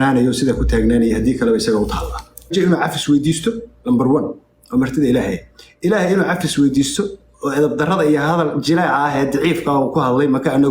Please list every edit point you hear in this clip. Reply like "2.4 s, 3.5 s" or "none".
2.5 s